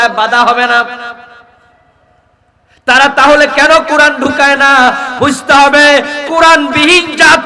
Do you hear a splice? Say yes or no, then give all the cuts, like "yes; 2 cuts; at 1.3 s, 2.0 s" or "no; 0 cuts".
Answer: no; 0 cuts